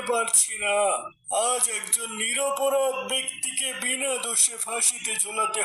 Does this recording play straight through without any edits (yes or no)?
no